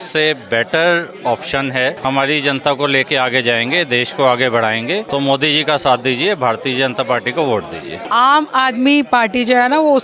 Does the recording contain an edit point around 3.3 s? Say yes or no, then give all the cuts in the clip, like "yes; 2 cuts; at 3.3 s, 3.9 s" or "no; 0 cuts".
no; 3 cuts; at 2.0 s, 5.1 s, 8.0 s